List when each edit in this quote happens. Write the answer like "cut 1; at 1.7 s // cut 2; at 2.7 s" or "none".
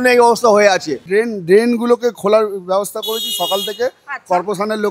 cut 1; at 1.0 s